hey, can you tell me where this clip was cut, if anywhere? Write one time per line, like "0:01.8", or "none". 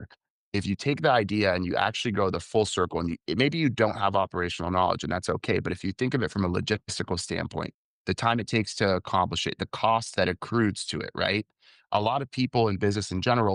none